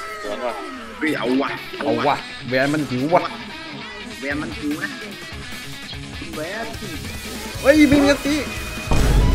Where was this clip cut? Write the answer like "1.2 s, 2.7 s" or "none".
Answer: none